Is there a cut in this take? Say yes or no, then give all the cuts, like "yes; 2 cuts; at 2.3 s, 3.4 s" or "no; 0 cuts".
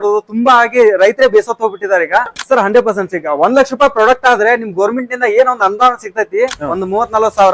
yes; 1 cut; at 2.3 s